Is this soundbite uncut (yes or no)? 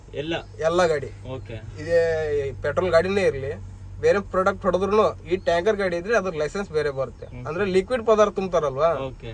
yes